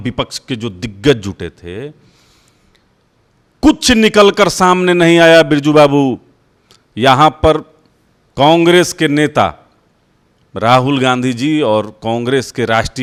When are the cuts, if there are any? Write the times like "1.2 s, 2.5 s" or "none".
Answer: none